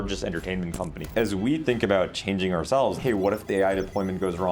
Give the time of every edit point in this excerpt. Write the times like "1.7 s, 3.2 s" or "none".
1.0 s, 2.9 s